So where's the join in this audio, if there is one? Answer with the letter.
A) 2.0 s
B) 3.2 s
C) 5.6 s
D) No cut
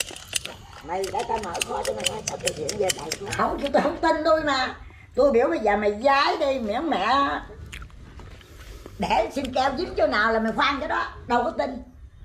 B